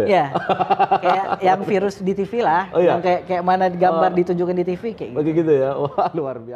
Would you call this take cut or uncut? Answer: uncut